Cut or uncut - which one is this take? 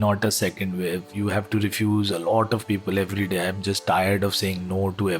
cut